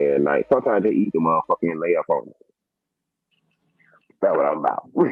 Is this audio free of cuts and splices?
yes; 0 cuts

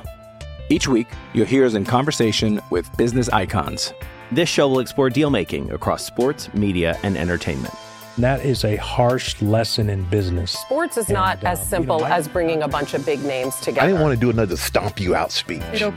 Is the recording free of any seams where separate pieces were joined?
yes; 0 cuts

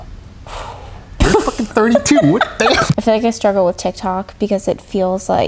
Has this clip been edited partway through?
yes; 1 cut; at 2.9 s

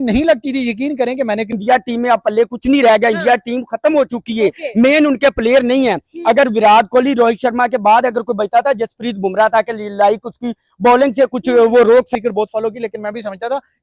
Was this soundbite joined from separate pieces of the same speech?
yes; 2 cuts; at 1.5 s, 12.1 s

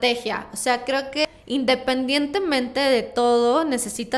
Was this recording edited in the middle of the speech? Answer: yes; 1 cut; at 1.2 s

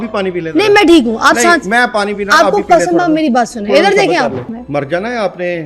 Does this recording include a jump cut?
yes; 1 cut; at 4.6 s

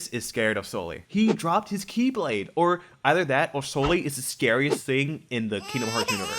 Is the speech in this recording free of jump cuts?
no; 1 cut; at 0.9 s

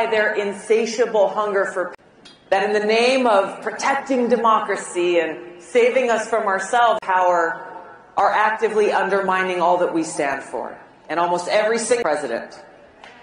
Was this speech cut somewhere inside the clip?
no; 0 cuts

